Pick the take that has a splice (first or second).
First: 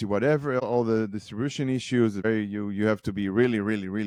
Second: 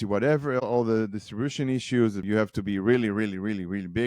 second